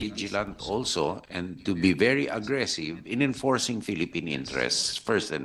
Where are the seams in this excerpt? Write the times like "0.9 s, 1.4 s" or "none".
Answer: none